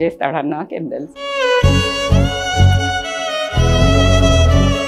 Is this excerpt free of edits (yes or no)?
yes